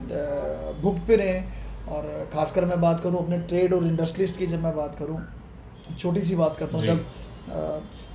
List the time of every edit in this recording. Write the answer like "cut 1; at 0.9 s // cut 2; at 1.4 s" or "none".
none